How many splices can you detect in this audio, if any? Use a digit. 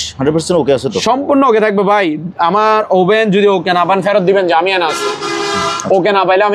0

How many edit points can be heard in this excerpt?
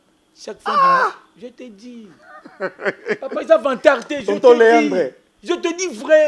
0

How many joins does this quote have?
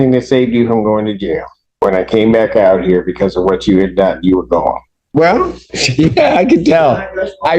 2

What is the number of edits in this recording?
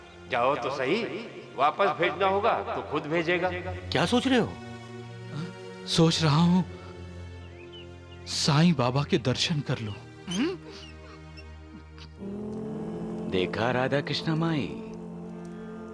0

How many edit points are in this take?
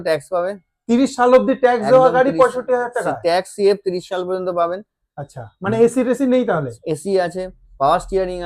0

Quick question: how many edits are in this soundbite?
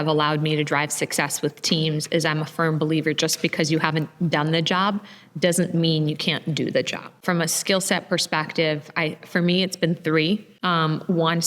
2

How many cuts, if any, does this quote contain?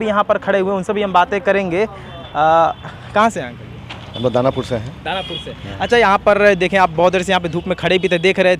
0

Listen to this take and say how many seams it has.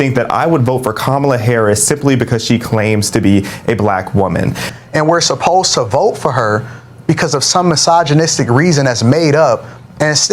1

